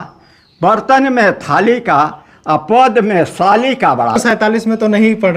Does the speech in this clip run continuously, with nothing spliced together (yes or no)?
no